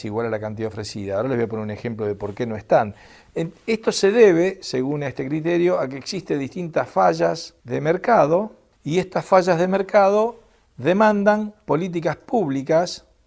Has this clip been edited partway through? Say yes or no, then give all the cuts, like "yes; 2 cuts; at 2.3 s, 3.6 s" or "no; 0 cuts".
no; 0 cuts